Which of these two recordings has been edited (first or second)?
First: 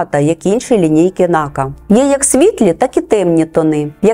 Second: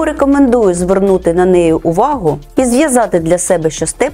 first